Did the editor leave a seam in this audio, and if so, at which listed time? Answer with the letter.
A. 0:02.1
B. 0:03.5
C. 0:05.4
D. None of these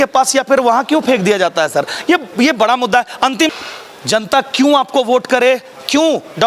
B